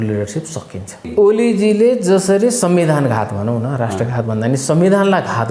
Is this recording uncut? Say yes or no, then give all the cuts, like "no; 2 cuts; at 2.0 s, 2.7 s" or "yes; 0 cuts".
no; 1 cut; at 1.1 s